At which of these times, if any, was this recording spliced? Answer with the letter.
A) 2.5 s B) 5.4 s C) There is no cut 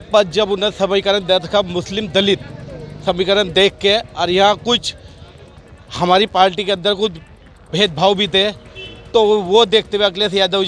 C